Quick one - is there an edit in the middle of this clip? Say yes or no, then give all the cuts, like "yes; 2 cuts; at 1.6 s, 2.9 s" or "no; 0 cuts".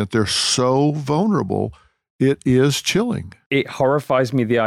yes; 1 cut; at 3.4 s